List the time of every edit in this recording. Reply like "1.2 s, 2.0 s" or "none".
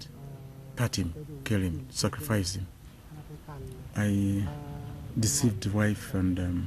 4.6 s